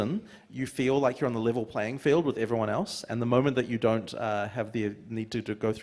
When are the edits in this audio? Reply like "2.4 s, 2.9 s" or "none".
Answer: none